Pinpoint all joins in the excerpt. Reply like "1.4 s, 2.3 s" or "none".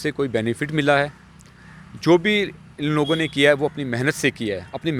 none